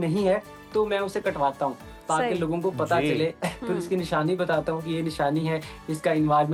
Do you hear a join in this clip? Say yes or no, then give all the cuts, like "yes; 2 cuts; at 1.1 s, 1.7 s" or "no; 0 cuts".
no; 0 cuts